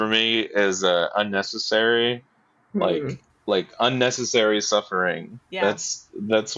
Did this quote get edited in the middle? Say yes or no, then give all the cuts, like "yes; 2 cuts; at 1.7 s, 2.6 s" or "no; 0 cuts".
no; 0 cuts